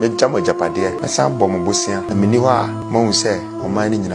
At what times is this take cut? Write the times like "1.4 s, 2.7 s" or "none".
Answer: 1.0 s, 2.1 s, 2.8 s